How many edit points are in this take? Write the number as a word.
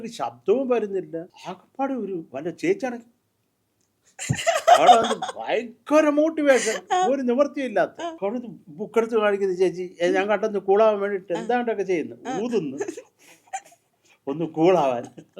two